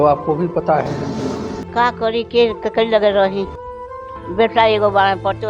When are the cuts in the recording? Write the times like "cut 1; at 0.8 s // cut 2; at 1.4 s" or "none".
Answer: cut 1; at 1.6 s